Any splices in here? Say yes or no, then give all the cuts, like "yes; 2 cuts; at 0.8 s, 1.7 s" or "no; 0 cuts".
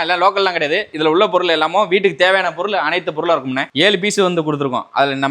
yes; 2 cuts; at 0.9 s, 3.6 s